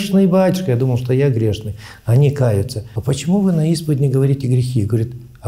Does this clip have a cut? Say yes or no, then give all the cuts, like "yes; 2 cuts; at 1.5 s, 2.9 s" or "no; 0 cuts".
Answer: yes; 1 cut; at 2.9 s